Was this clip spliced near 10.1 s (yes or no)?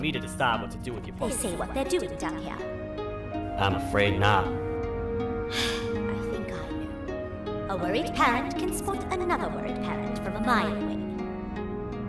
no